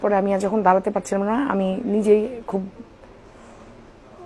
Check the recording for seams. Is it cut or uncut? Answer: uncut